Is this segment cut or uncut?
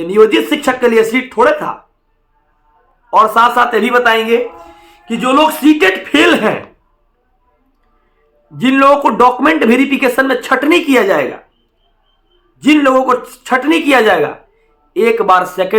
uncut